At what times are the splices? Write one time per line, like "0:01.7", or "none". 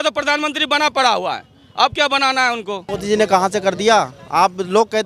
0:02.9

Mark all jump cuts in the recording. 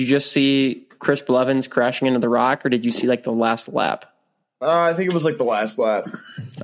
none

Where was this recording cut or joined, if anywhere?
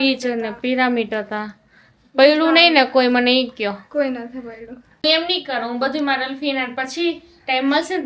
0:05.0

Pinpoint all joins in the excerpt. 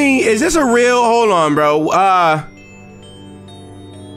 none

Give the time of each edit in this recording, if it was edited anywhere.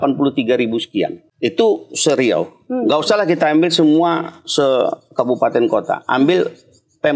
0:01.2

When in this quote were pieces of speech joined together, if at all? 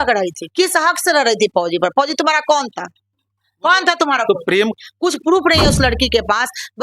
0:04.7

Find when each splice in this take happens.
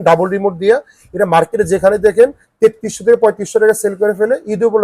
none

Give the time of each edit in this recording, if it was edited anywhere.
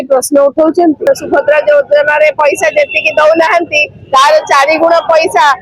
0:01.0

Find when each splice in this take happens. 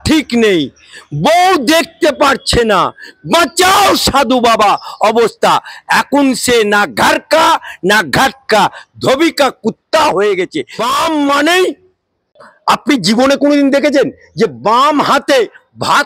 0:10.7

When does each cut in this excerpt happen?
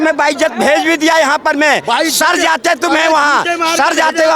none

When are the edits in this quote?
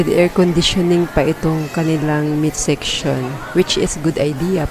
none

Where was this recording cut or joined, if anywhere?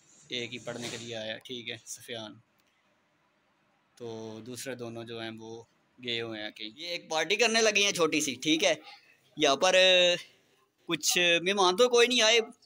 0:07.0

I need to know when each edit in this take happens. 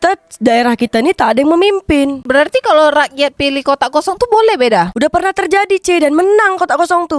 none

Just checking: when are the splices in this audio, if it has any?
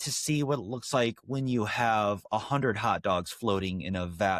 none

